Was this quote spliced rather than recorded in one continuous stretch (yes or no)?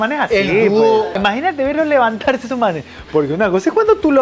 yes